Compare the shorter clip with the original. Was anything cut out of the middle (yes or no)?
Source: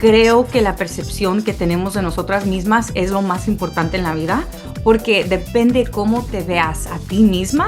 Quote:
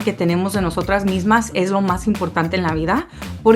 no